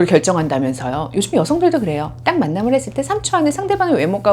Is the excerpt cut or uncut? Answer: uncut